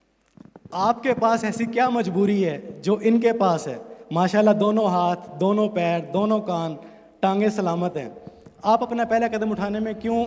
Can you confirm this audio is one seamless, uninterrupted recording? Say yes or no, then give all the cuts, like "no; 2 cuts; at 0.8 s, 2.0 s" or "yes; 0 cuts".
yes; 0 cuts